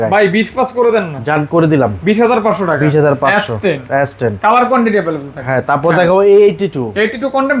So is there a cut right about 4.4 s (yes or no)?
no